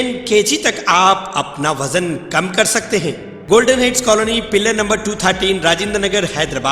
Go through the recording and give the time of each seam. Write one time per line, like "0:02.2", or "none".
0:03.3